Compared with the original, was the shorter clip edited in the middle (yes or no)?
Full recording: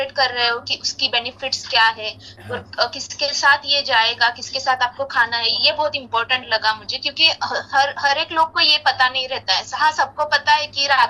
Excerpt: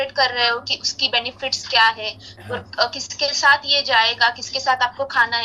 no